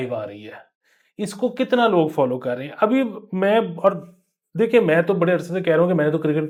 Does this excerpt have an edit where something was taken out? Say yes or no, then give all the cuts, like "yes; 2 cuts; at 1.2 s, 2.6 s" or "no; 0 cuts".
no; 0 cuts